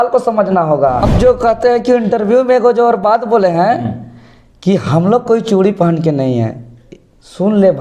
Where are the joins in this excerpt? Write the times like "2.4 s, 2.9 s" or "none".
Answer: 1.1 s

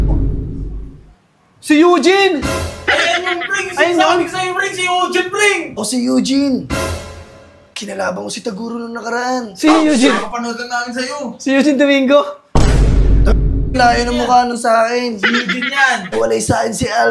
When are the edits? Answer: 5.8 s, 16.1 s

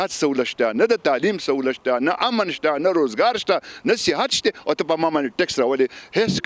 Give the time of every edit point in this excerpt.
none

